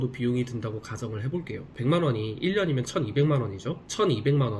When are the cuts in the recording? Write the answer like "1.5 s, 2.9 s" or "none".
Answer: none